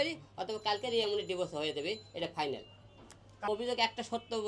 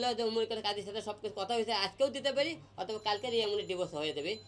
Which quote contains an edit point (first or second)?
first